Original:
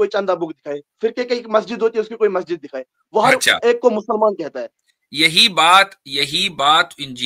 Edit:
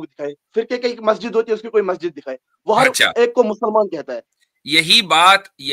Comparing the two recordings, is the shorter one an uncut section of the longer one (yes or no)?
yes